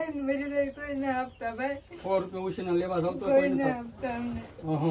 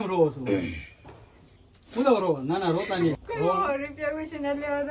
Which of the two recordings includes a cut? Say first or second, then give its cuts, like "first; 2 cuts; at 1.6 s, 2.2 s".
second; 1 cut; at 3.2 s